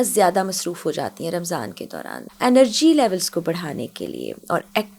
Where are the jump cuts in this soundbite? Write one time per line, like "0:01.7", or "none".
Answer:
0:02.2